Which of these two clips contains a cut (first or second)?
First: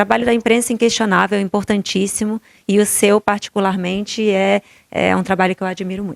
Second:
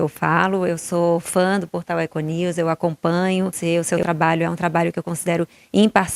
second